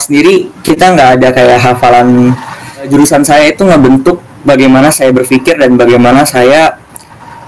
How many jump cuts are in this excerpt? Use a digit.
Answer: 1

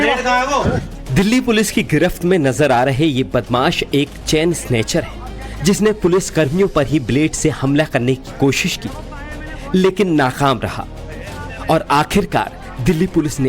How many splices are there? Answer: 2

